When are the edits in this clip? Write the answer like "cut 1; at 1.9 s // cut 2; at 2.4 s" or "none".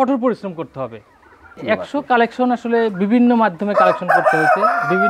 cut 1; at 1.6 s